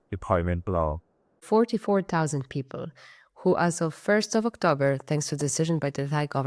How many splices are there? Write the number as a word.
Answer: one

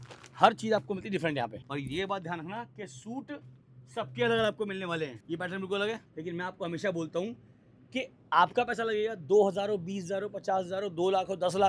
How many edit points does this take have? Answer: three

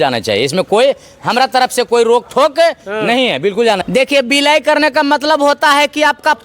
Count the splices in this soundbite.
one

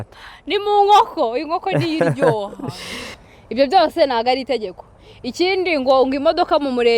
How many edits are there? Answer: one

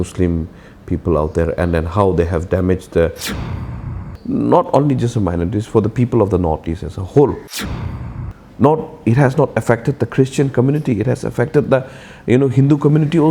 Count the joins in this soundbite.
two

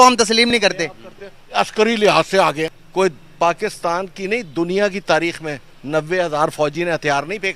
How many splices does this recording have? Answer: one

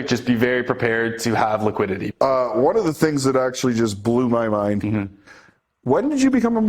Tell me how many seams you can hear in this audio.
one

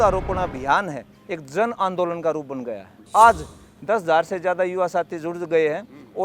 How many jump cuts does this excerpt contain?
one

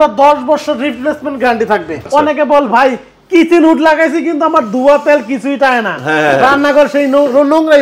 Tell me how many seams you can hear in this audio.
one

